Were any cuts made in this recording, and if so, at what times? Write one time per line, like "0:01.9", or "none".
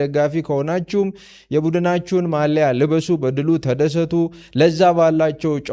none

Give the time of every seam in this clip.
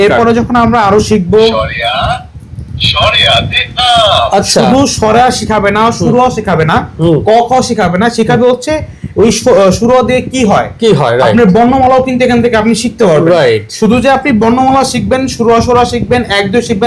none

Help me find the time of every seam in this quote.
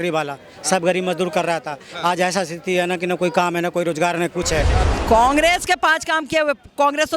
0:04.8

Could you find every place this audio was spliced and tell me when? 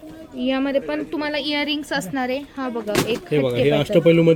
none

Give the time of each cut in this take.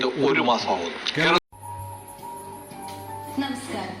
0:01.4

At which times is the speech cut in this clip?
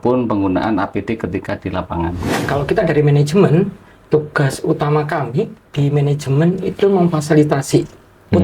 0:02.3

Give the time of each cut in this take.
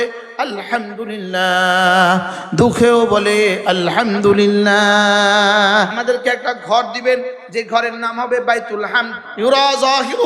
0:06.0
0:09.2

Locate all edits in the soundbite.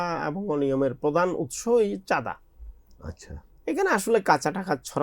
none

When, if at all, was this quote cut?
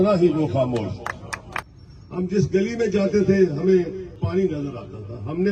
0:01.7
0:04.1

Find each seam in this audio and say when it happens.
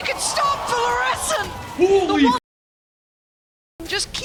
none

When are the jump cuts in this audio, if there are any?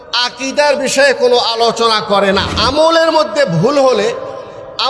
0:02.7

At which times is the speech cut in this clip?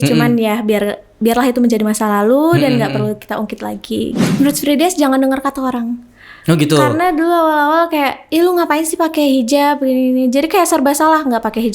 0:04.2

